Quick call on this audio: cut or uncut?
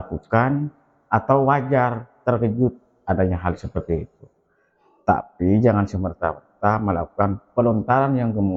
uncut